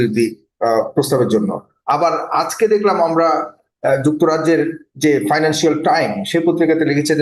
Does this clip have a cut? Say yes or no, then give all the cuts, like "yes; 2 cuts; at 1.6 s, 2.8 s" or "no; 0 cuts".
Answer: no; 0 cuts